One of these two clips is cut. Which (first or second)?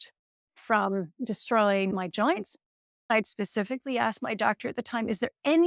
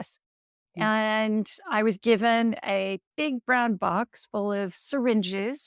first